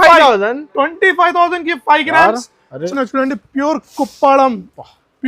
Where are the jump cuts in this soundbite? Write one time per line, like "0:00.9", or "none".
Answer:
0:02.9